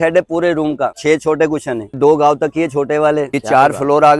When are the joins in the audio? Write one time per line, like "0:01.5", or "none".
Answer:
0:01.0
0:02.0
0:03.3